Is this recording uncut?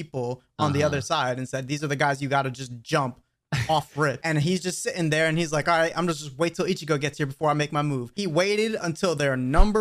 no; 2 cuts; at 4.2 s, 8.1 s

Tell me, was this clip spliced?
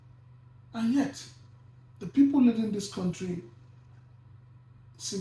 no; 0 cuts

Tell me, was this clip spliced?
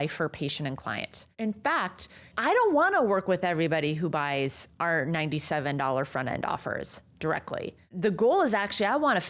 yes; 2 cuts; at 2.3 s, 4.7 s

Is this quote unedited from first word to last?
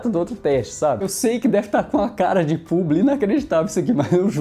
no; 1 cut; at 1.0 s

